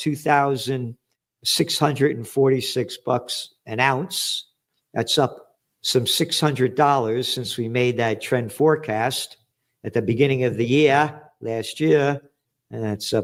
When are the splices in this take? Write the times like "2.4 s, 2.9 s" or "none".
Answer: none